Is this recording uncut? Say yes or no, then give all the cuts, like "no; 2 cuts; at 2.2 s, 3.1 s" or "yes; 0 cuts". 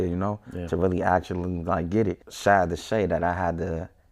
no; 1 cut; at 2.3 s